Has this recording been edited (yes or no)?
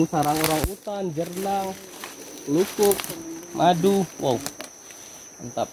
no